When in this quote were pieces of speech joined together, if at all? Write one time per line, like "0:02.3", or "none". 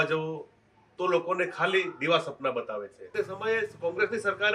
0:03.1